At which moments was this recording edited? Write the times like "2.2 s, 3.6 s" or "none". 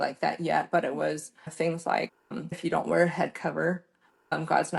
1.5 s, 2.6 s